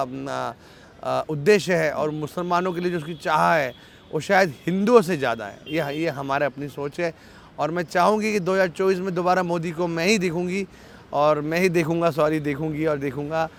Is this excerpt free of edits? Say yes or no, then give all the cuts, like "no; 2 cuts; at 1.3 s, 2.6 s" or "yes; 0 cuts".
yes; 0 cuts